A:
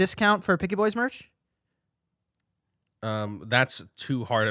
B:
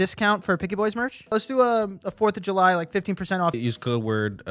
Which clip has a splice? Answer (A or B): B